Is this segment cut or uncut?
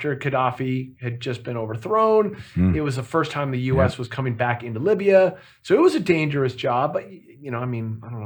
uncut